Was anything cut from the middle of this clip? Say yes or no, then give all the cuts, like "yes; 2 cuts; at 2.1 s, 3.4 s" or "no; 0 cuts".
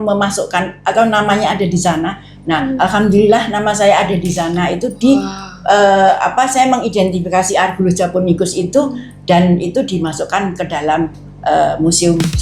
no; 0 cuts